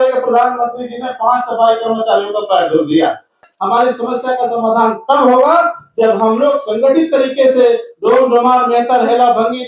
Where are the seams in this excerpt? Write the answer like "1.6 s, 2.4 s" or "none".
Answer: 3.4 s